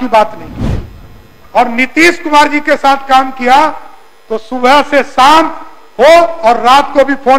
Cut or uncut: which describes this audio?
uncut